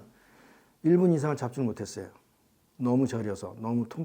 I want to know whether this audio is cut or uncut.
uncut